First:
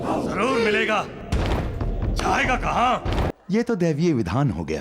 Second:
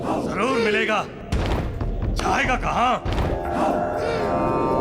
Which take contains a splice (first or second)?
first